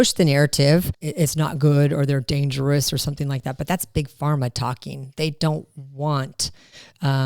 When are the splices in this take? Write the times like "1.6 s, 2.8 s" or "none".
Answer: 1.0 s